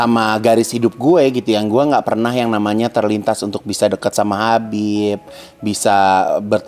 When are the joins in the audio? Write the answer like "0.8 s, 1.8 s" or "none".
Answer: none